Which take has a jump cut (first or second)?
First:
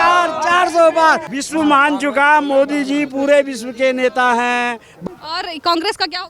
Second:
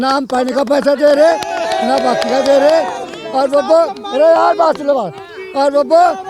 first